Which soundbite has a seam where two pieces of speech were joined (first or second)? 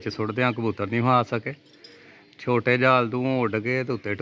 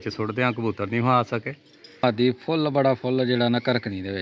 second